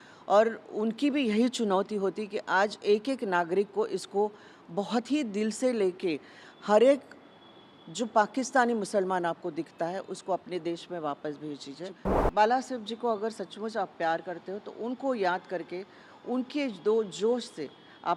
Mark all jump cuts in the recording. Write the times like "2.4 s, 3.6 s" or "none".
12.0 s